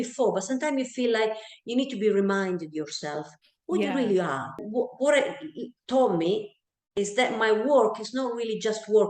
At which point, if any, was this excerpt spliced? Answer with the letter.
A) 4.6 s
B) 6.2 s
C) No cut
A